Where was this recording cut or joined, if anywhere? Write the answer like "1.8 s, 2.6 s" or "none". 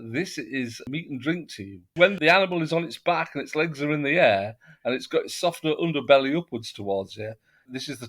2.0 s